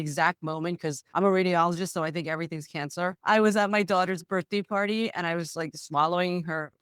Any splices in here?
no; 0 cuts

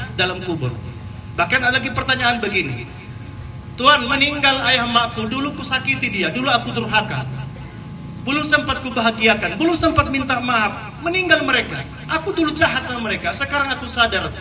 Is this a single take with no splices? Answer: yes; 0 cuts

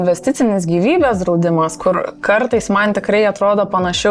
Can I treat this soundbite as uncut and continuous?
yes; 0 cuts

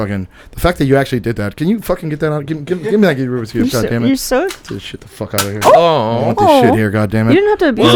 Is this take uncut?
yes; 0 cuts

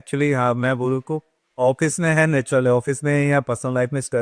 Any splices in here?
no; 0 cuts

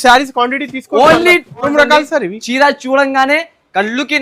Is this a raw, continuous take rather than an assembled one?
no; 1 cut; at 1.7 s

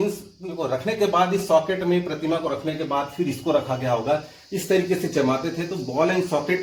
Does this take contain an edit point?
no; 0 cuts

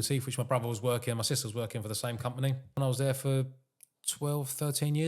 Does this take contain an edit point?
yes; 1 cut; at 2.8 s

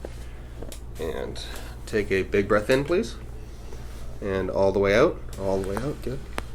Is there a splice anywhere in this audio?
no; 0 cuts

